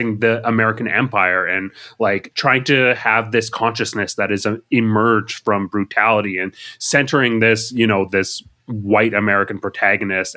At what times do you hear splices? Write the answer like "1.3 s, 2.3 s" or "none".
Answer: none